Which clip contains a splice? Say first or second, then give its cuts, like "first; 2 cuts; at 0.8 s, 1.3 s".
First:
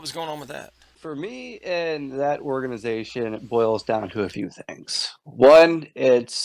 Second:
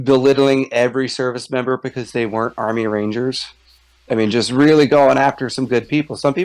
first; 1 cut; at 1.0 s